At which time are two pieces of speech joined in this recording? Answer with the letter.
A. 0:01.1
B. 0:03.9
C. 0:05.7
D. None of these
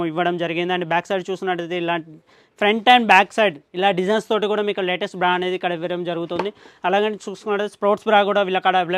D